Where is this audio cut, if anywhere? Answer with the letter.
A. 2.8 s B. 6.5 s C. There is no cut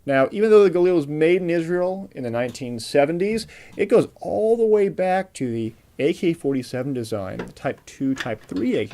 B